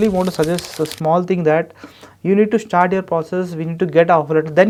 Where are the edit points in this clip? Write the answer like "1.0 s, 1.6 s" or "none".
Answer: none